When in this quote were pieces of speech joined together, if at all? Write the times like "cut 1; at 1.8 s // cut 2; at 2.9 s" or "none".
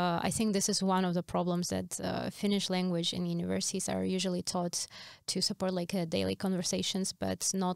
none